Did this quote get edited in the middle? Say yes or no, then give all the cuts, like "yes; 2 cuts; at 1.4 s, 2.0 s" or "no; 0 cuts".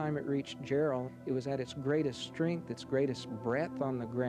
no; 0 cuts